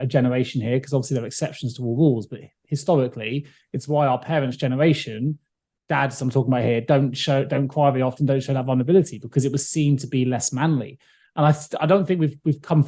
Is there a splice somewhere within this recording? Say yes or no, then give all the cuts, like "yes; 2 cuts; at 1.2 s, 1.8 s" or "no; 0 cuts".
no; 0 cuts